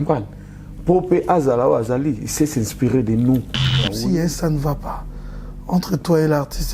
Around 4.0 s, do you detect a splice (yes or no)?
yes